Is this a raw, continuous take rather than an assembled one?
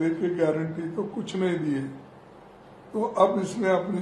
yes; 0 cuts

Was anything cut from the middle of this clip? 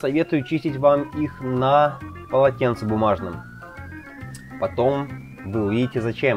no; 0 cuts

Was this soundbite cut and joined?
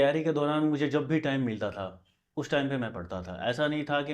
no; 0 cuts

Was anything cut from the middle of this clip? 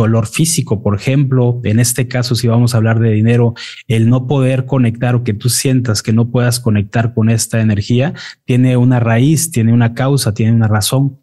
no; 0 cuts

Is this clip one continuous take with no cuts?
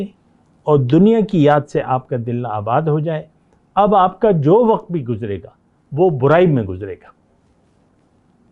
yes; 0 cuts

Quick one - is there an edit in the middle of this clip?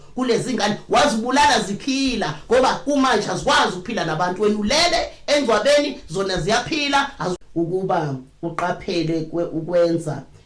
yes; 1 cut; at 7.3 s

